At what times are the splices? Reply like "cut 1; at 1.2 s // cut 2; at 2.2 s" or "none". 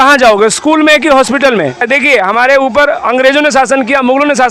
cut 1; at 1.9 s